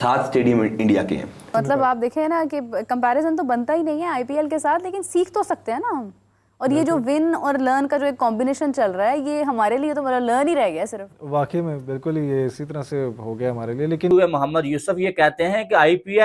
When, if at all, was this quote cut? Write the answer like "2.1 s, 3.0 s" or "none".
1.4 s, 14.1 s